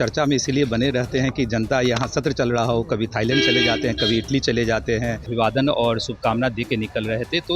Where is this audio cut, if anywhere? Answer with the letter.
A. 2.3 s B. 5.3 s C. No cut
B